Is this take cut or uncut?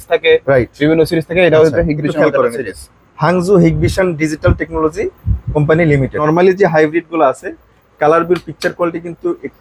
cut